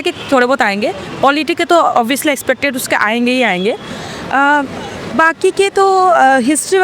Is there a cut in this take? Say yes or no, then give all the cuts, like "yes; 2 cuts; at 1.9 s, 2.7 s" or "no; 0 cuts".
no; 0 cuts